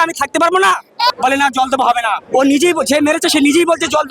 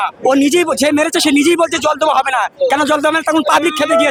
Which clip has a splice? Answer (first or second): first